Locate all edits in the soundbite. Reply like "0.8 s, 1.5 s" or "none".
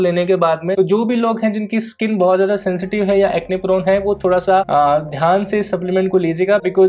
none